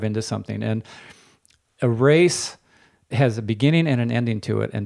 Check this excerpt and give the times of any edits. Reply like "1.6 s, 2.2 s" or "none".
3.0 s